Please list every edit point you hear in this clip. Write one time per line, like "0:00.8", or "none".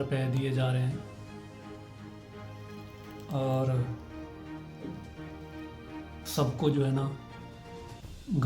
none